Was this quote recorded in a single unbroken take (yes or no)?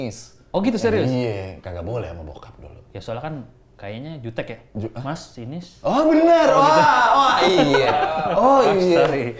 yes